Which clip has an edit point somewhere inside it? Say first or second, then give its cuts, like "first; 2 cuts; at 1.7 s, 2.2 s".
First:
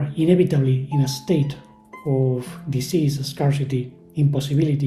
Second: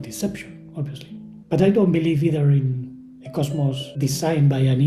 second; 2 cuts; at 1.3 s, 3.9 s